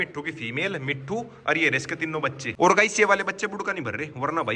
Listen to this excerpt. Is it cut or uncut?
cut